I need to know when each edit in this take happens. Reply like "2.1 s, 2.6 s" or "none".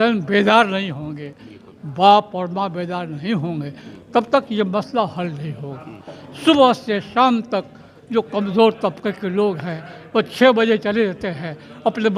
none